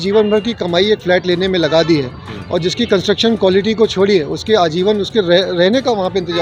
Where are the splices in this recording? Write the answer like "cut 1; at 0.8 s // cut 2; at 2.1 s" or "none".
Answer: none